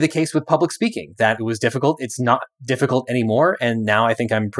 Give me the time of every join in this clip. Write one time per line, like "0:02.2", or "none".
0:01.4